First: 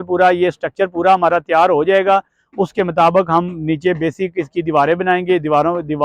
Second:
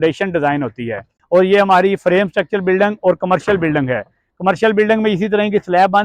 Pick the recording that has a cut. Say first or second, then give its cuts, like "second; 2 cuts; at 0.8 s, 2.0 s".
second; 1 cut; at 1.1 s